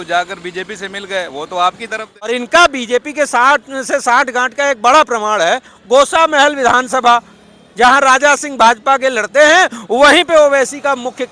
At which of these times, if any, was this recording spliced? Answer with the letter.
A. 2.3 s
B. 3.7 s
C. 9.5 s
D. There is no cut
A